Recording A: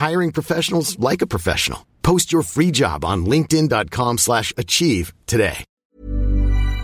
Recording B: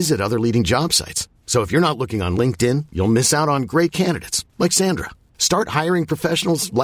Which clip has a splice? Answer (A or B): A